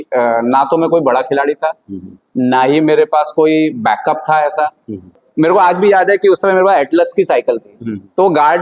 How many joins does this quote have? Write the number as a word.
one